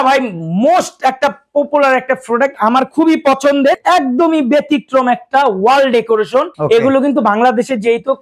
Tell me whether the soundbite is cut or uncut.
cut